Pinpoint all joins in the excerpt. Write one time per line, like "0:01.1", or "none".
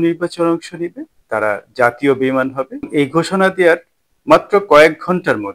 0:02.9